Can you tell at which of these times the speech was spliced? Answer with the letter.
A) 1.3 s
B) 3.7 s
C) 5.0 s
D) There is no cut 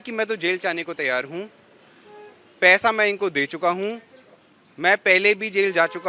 D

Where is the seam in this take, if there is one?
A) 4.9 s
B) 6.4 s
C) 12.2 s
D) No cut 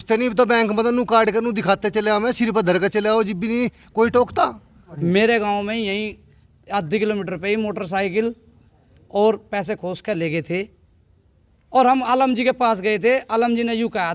A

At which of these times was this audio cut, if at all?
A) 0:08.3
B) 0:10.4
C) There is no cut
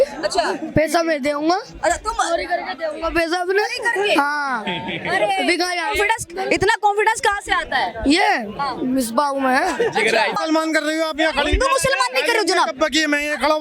B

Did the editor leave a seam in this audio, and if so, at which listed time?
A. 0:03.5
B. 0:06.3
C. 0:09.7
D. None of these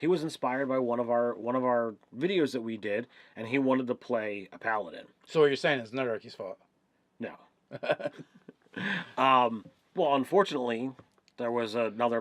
A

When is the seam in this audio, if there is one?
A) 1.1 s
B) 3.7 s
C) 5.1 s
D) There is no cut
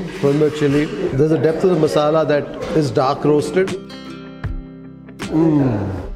B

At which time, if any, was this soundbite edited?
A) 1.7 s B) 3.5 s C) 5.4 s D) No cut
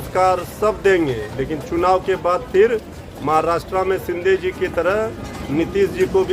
D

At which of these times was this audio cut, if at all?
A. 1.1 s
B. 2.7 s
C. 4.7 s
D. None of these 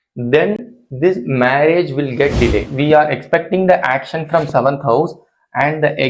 B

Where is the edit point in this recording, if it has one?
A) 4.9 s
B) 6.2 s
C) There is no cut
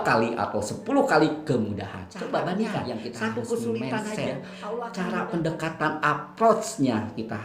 A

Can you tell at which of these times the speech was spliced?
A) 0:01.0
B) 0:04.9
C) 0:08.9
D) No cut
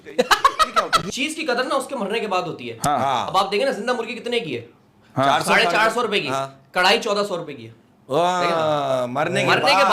A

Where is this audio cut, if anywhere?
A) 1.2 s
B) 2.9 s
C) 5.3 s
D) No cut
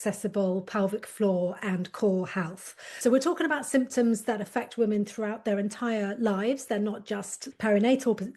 B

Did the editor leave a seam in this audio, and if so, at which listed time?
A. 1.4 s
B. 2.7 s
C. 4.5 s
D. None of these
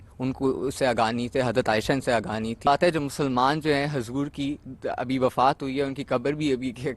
B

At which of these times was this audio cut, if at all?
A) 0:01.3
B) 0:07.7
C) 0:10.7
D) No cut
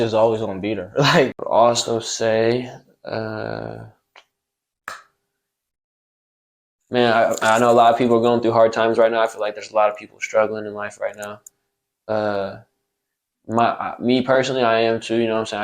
A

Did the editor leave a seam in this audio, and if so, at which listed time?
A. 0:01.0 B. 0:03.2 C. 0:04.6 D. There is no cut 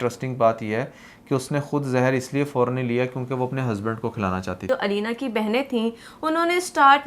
C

